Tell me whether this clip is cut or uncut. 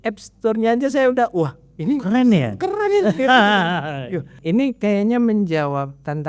cut